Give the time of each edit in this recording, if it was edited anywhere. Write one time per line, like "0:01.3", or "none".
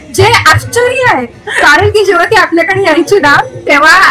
none